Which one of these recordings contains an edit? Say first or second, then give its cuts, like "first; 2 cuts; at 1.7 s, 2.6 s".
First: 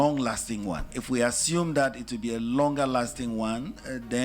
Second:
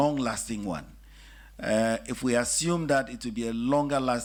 first; 1 cut; at 1.0 s